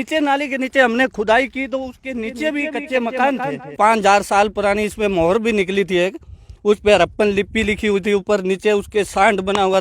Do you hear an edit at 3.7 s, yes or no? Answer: yes